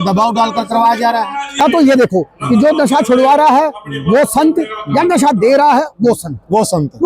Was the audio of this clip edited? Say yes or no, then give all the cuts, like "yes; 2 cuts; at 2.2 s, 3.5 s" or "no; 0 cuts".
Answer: yes; 1 cut; at 1.6 s